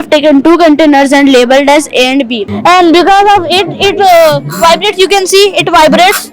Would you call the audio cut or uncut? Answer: cut